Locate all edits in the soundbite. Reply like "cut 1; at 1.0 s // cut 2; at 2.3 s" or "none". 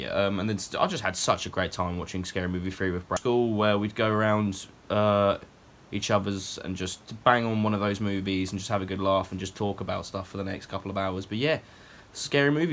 cut 1; at 3.2 s